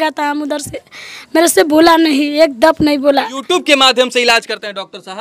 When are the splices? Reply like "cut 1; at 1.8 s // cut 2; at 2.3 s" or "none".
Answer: cut 1; at 3.4 s